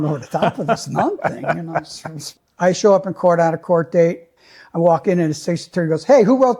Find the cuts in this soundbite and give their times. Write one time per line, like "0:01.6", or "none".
0:02.2
0:04.3